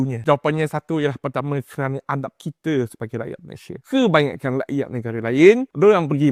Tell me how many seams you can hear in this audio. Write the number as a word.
zero